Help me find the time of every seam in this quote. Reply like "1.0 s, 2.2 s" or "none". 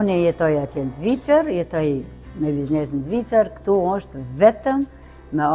none